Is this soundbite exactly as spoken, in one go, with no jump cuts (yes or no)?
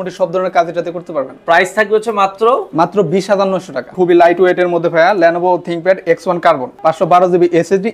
no